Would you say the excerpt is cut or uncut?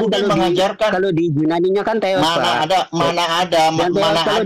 uncut